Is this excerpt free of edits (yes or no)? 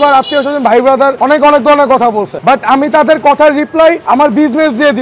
no